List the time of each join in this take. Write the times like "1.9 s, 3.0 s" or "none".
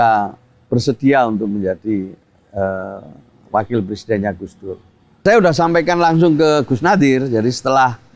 5.2 s